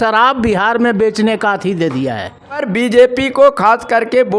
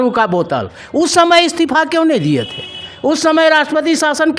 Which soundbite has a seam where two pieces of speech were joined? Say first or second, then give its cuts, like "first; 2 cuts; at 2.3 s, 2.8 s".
first; 1 cut; at 2.7 s